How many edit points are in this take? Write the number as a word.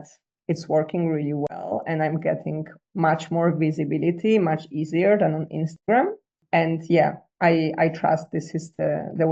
zero